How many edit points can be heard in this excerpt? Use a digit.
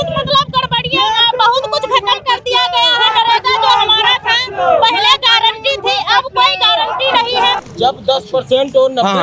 1